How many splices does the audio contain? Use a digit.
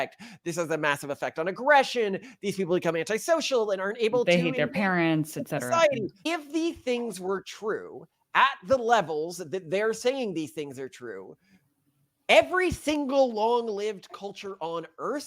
1